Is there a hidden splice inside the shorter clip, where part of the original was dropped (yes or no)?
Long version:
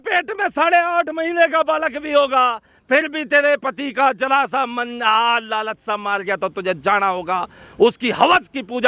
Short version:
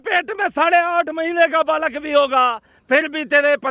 no